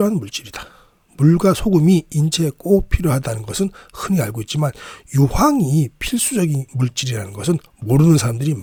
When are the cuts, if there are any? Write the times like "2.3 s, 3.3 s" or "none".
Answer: none